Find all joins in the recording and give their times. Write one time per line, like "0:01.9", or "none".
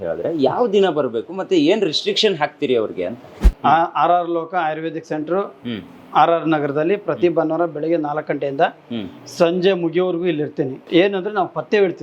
0:10.8